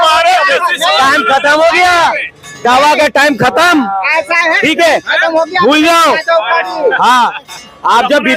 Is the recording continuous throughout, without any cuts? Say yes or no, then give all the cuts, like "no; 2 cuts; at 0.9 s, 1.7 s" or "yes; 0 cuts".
yes; 0 cuts